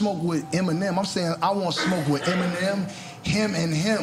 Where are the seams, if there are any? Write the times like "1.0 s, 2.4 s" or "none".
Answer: none